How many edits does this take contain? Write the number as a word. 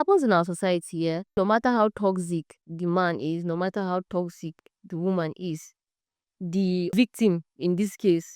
two